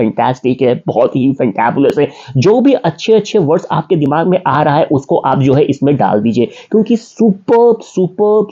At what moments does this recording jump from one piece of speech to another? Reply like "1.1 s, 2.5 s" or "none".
none